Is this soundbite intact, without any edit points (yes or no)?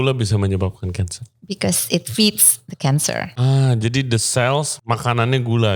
no